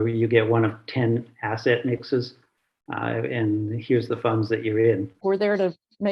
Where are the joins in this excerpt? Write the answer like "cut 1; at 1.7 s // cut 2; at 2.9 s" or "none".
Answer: cut 1; at 5.2 s